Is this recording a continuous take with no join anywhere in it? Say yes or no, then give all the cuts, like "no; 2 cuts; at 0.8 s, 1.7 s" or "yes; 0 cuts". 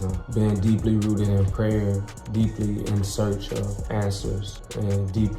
yes; 0 cuts